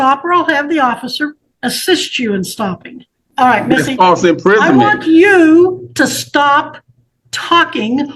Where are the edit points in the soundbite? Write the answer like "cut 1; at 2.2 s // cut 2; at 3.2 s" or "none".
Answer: cut 1; at 1.5 s // cut 2; at 3.2 s